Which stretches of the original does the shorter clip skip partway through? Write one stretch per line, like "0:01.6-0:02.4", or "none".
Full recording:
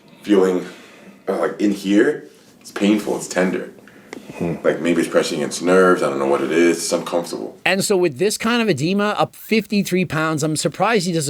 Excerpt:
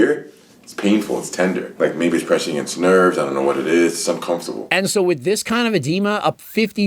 0:03.7-0:04.6
0:07.4-0:07.5